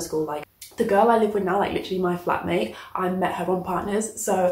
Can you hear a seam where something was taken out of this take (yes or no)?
no